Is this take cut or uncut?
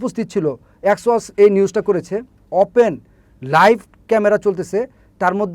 cut